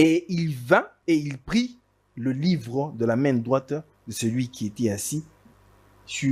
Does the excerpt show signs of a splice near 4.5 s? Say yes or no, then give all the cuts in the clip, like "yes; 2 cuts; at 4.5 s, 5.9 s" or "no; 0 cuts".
no; 1 cut; at 0.9 s